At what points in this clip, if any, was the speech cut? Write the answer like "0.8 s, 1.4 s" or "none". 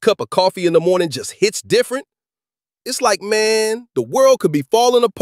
none

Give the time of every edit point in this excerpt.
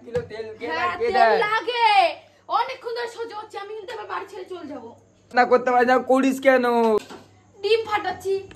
5.3 s, 7.0 s

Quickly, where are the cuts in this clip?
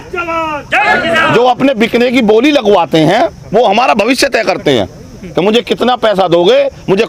none

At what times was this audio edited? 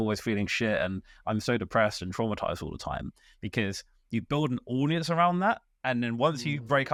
none

